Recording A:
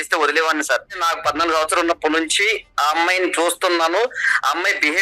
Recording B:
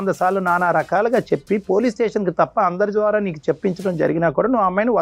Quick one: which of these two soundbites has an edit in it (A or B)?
A